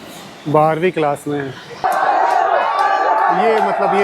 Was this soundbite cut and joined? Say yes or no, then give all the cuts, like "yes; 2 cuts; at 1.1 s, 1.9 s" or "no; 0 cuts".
yes; 1 cut; at 1.8 s